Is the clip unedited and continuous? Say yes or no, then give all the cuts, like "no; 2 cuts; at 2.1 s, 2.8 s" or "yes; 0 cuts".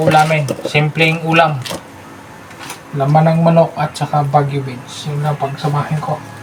yes; 0 cuts